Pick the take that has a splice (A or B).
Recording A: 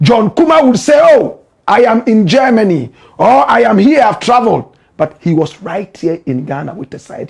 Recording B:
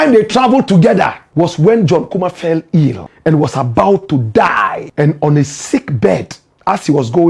B